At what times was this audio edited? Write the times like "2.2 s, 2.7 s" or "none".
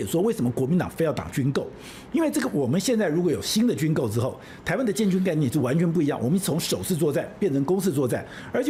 none

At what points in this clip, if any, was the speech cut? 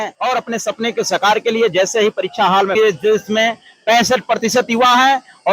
2.8 s

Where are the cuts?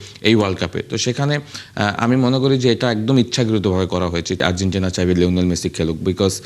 4.4 s

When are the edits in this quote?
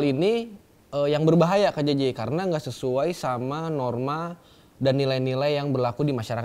none

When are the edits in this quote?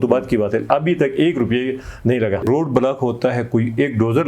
2.4 s

